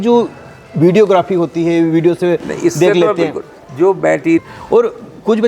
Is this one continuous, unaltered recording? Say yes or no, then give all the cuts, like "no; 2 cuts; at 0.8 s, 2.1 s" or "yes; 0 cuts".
no; 1 cut; at 4.4 s